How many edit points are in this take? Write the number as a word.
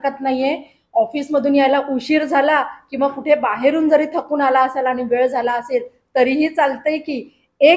zero